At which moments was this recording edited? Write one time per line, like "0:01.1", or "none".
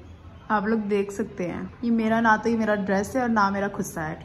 0:01.7